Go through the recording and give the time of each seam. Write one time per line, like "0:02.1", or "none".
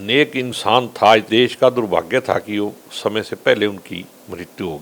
0:01.3